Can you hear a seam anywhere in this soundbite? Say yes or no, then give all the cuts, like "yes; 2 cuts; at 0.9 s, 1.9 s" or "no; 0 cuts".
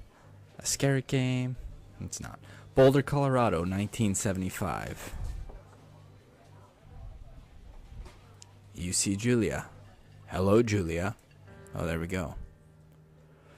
no; 0 cuts